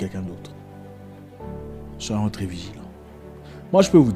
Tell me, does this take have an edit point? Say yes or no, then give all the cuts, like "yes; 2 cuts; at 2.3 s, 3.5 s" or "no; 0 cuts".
no; 0 cuts